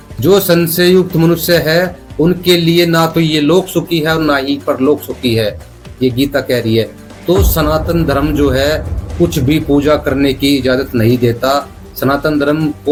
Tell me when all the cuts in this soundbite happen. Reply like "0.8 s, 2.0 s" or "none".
none